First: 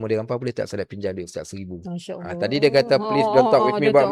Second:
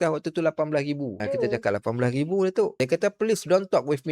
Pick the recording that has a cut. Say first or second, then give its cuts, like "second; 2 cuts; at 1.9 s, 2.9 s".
second; 2 cuts; at 1.2 s, 2.7 s